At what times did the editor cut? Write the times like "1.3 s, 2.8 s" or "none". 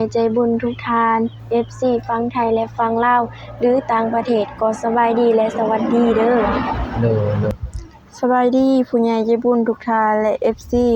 7.5 s